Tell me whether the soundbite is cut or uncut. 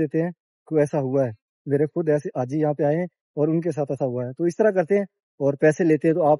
uncut